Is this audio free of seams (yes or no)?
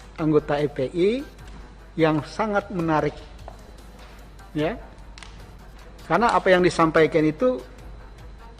yes